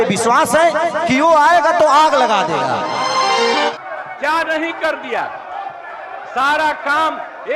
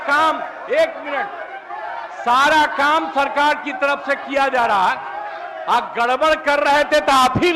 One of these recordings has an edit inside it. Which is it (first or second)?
first